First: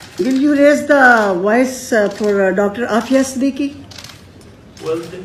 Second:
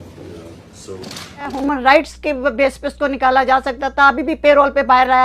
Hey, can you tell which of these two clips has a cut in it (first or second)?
second